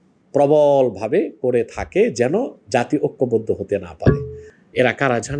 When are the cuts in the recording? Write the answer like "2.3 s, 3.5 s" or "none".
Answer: 4.5 s